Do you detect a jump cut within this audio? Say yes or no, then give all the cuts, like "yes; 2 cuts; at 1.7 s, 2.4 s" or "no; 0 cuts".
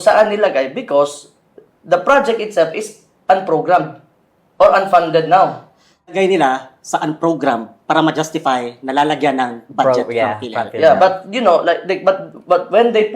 yes; 1 cut; at 6.1 s